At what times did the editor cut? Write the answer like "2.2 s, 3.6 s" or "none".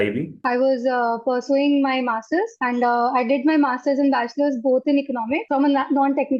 5.4 s